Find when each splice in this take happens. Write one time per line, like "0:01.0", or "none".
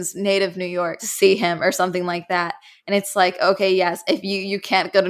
0:01.0